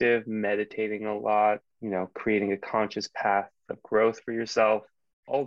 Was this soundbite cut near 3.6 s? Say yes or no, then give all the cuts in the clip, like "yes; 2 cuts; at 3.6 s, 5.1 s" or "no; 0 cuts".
no; 1 cut; at 1.7 s